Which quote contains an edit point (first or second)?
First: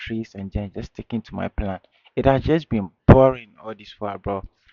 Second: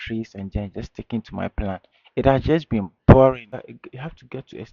second